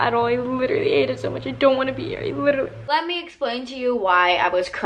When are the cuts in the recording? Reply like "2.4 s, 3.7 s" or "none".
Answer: 2.8 s